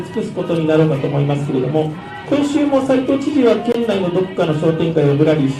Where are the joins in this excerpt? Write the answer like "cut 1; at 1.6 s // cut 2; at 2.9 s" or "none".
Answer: none